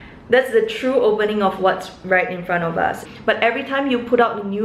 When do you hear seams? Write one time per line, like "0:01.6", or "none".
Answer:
0:03.0